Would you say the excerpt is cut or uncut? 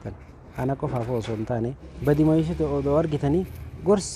cut